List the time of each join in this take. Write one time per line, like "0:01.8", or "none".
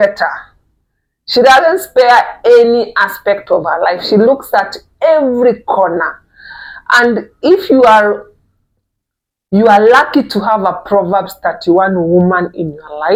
none